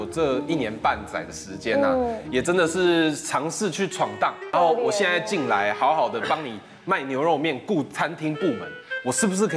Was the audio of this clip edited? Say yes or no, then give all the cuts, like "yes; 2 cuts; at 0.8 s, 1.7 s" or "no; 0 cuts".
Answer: yes; 1 cut; at 4.5 s